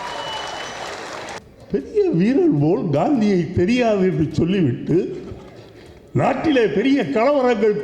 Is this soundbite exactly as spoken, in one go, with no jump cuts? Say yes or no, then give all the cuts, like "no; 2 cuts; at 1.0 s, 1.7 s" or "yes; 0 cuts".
no; 1 cut; at 1.4 s